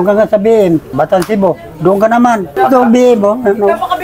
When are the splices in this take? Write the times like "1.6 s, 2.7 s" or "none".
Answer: 0.9 s, 2.5 s